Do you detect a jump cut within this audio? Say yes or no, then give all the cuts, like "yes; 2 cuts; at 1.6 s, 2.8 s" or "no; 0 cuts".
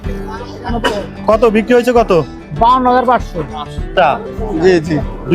yes; 1 cut; at 3.9 s